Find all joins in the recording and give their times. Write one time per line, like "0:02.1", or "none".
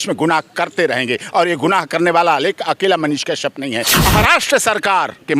0:04.0